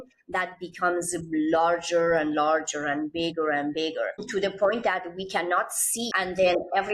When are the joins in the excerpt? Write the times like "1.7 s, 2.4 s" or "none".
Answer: 4.2 s, 6.0 s